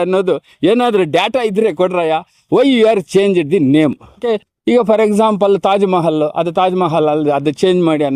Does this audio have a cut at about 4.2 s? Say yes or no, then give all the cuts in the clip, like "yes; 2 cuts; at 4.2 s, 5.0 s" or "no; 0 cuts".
yes; 1 cut; at 4.2 s